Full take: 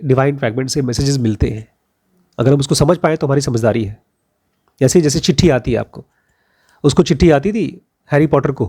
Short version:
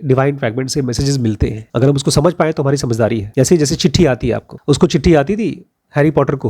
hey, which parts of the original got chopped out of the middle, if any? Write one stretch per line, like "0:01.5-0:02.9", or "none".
0:01.6-0:02.3
0:03.9-0:04.7
0:05.9-0:06.7